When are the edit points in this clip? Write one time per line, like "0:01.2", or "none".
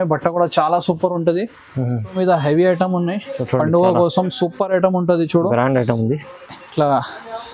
0:02.1